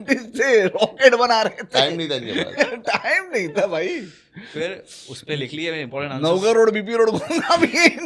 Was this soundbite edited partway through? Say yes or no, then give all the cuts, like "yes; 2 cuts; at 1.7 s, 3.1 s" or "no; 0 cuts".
no; 0 cuts